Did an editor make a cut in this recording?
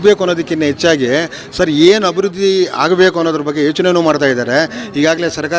no; 0 cuts

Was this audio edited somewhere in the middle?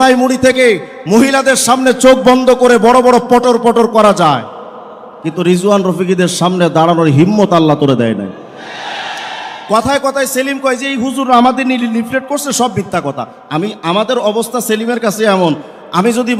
no; 0 cuts

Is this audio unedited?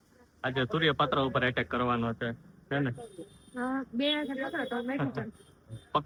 yes; 0 cuts

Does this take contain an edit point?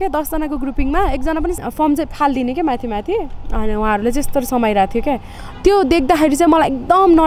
yes; 1 cut; at 1.6 s

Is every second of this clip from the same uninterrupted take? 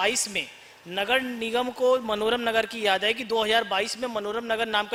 yes; 0 cuts

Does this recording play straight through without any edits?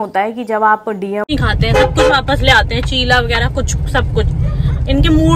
no; 1 cut; at 1.3 s

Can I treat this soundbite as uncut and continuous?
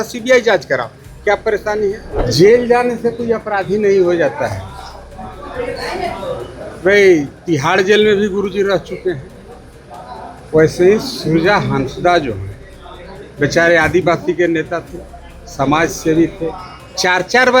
no; 1 cut; at 2.2 s

